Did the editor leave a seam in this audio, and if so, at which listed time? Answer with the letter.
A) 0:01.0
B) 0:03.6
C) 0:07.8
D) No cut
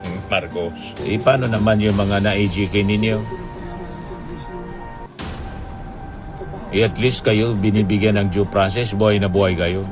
A